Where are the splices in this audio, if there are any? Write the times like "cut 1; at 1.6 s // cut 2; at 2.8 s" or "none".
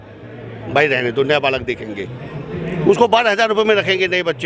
none